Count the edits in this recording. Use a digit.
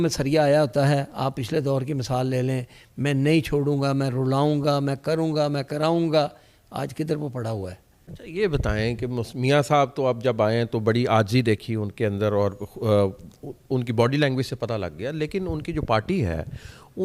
1